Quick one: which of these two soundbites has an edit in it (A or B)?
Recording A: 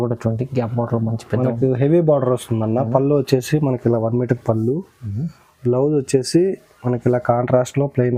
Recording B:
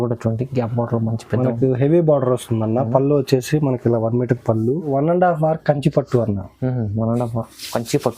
B